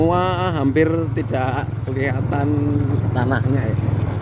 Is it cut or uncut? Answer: uncut